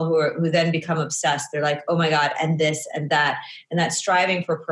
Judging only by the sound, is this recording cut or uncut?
uncut